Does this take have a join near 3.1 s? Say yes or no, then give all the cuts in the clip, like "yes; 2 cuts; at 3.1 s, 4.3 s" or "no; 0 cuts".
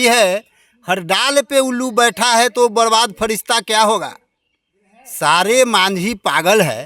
no; 0 cuts